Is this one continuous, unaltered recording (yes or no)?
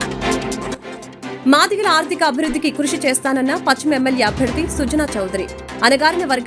no